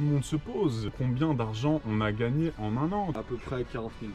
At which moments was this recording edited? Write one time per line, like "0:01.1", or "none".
0:00.9
0:03.2